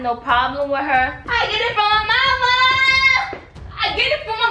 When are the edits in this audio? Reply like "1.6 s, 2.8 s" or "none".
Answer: 1.2 s